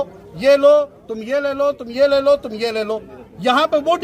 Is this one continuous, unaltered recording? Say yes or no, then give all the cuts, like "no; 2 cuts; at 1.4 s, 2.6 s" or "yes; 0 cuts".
yes; 0 cuts